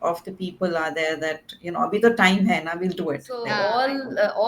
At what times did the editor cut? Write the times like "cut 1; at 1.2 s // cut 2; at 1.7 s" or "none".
cut 1; at 3.4 s